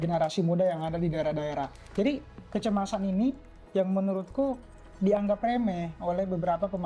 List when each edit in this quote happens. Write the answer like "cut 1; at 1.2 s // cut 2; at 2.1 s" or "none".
cut 1; at 1.8 s